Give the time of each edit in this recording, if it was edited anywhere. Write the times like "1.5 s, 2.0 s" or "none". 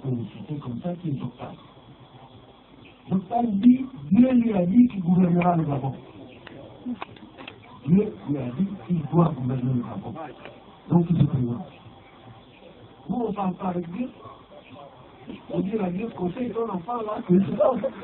6.9 s

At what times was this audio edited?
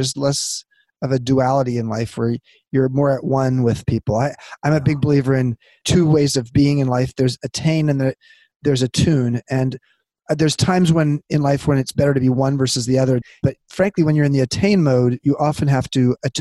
5.8 s, 13.4 s

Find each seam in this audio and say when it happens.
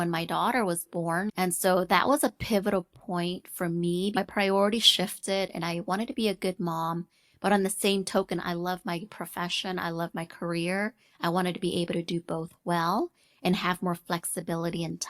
1.3 s, 4.2 s

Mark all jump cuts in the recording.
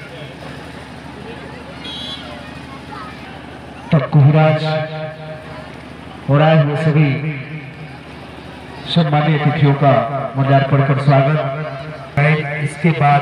none

